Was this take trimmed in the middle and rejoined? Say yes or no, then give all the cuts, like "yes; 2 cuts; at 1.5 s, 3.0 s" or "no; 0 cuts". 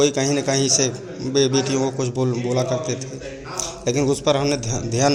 no; 0 cuts